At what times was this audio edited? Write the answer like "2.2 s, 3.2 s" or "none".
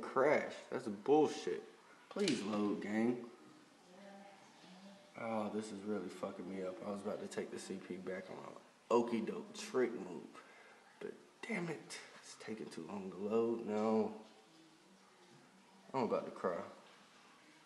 5.7 s

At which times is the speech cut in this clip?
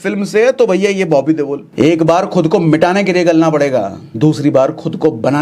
1.6 s, 4.0 s

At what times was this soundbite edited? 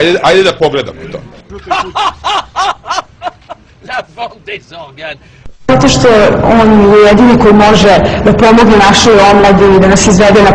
none

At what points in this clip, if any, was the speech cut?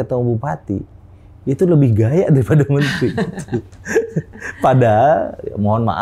none

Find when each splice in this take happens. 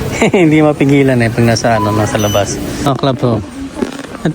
2.8 s

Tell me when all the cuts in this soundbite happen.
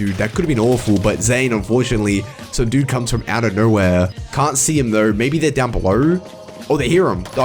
4.2 s

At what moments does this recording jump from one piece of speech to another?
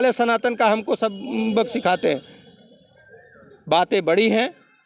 none

